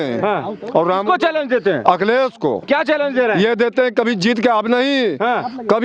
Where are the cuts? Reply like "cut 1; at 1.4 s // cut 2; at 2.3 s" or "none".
none